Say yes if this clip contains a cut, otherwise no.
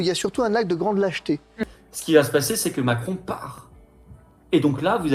yes